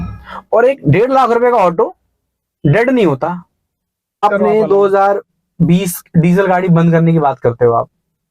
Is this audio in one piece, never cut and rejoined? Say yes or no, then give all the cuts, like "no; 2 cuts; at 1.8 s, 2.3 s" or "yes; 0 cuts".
no; 1 cut; at 4.2 s